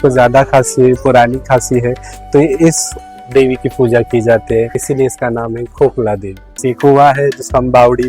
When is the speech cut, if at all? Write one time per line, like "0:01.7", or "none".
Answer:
0:04.8
0:06.5

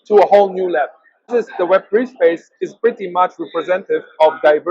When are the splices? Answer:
0:01.3

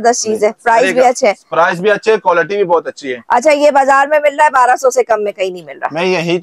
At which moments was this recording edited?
none

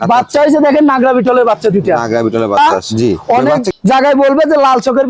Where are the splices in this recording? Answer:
0:02.6

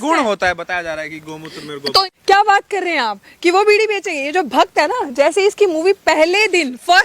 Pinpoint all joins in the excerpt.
0:02.0

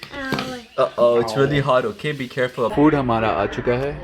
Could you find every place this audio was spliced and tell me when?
0:02.7

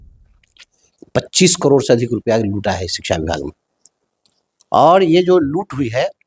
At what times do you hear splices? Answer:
none

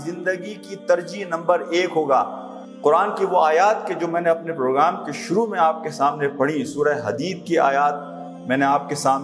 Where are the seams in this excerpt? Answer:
none

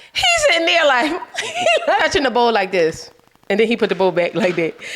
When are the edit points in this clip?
0:02.0

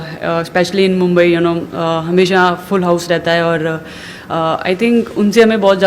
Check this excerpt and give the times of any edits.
none

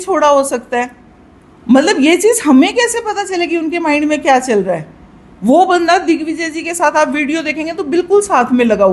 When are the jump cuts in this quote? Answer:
none

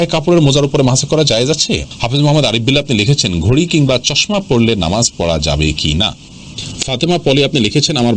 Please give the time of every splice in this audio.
0:01.9
0:06.8

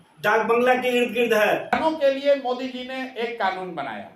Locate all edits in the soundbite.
0:01.8

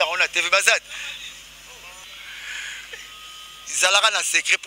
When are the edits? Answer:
0:02.0

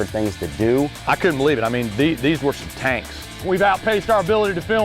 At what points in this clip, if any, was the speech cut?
0:01.0
0:03.4

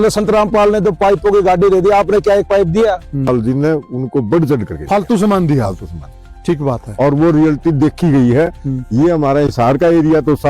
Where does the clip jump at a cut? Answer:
0:03.3

